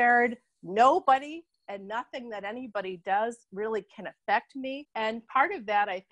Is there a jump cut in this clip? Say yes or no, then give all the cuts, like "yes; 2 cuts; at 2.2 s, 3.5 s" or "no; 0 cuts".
no; 0 cuts